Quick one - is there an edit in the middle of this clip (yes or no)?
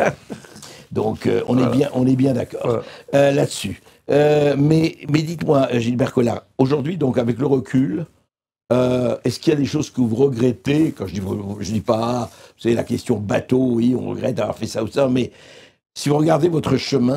no